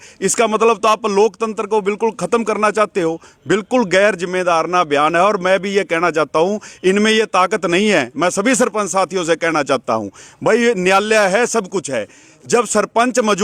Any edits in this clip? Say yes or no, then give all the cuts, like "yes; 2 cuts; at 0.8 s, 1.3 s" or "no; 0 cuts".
no; 0 cuts